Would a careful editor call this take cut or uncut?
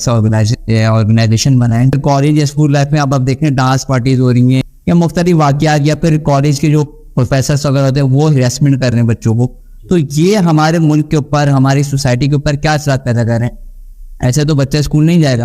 cut